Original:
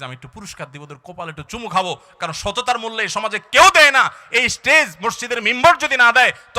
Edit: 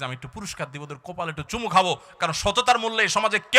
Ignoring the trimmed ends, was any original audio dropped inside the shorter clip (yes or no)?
no